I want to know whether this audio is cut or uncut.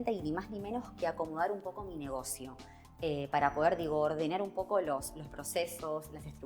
uncut